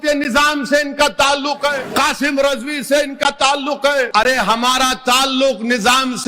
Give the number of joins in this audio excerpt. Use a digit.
2